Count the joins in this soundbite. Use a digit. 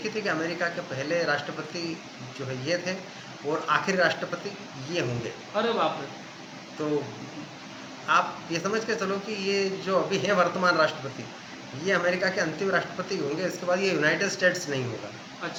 0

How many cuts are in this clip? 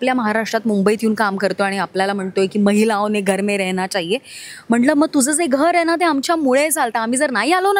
0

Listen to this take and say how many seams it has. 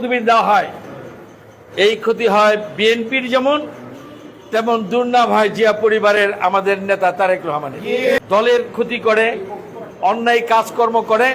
1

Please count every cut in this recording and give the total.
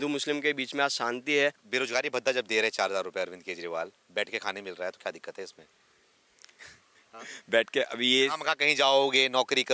1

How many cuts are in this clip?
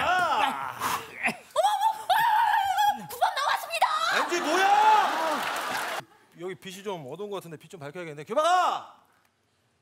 1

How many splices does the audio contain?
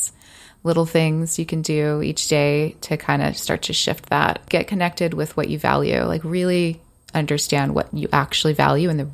2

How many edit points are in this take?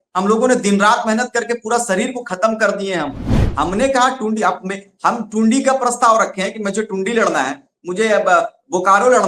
1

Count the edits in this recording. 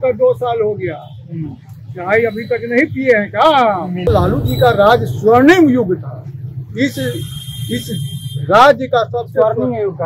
1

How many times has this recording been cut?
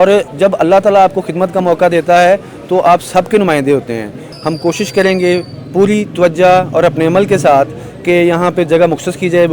1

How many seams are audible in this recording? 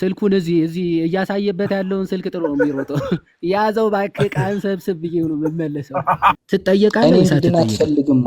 1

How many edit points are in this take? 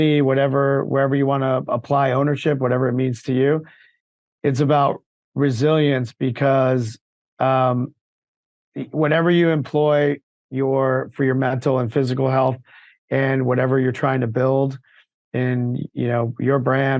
0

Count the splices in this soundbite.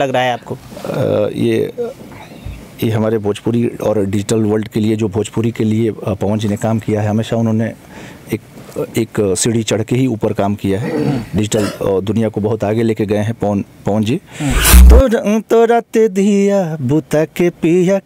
1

